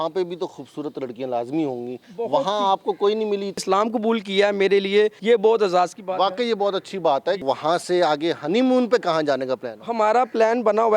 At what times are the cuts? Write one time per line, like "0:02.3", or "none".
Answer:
0:03.6
0:05.2
0:07.4